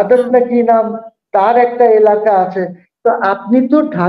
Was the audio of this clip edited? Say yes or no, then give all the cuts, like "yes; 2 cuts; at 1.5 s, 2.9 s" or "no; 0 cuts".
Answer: no; 0 cuts